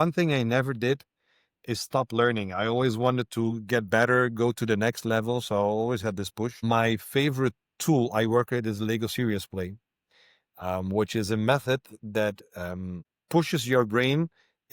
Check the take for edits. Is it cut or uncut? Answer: cut